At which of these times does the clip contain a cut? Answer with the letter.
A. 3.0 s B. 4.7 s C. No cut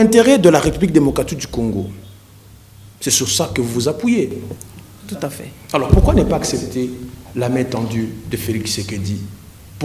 C